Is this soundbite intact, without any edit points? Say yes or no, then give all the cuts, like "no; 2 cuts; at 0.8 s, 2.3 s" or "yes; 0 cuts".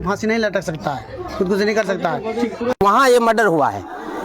no; 1 cut; at 2.8 s